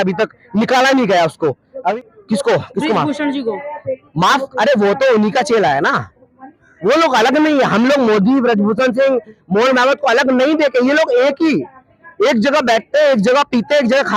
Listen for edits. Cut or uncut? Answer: cut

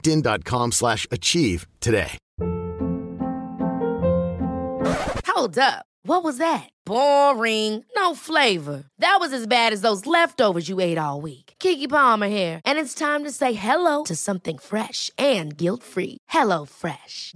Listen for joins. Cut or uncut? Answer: cut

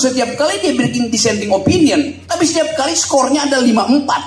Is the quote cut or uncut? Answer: uncut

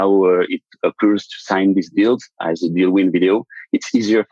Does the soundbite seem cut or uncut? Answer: uncut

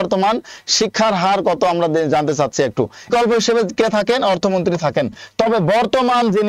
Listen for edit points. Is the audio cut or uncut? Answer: cut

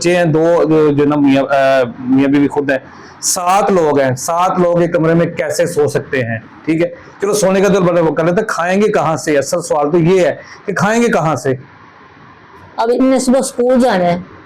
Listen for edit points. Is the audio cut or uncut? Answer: uncut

